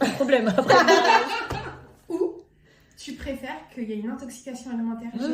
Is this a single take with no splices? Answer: no; 1 cut; at 1.9 s

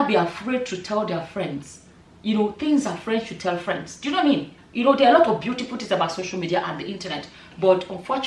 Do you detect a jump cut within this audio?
yes; 1 cut; at 4.6 s

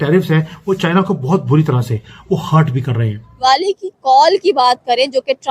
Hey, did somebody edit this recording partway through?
yes; 1 cut; at 3.4 s

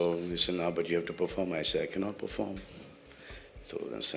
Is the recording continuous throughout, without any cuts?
yes; 0 cuts

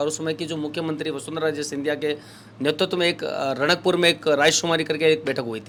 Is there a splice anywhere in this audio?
no; 0 cuts

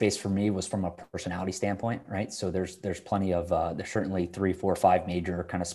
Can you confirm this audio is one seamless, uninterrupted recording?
yes; 0 cuts

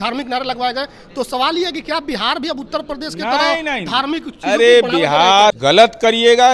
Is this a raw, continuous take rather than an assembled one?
no; 1 cut; at 5.6 s

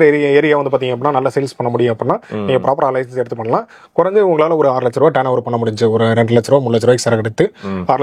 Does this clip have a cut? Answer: no; 0 cuts

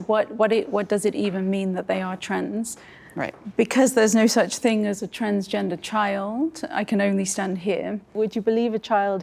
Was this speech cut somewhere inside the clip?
yes; 1 cut; at 8.1 s

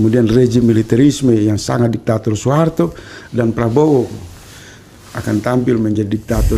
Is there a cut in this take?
no; 0 cuts

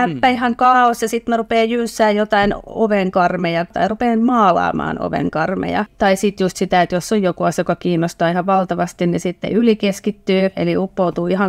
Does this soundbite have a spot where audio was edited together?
yes; 2 cuts; at 3.7 s, 5.9 s

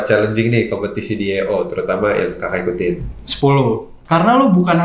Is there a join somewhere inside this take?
yes; 1 cut; at 3.9 s

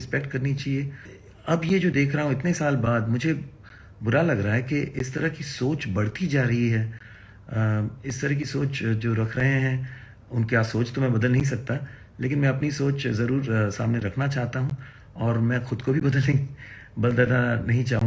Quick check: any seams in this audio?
yes; 1 cut; at 1.2 s

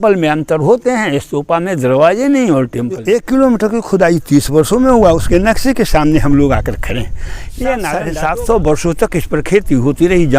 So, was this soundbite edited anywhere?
yes; 2 cuts; at 3.0 s, 8.1 s

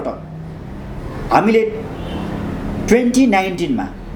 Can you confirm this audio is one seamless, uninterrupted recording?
yes; 0 cuts

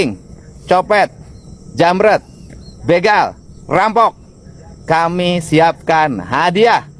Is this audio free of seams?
yes; 0 cuts

